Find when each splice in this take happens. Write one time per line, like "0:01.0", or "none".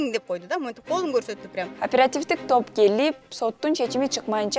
0:01.8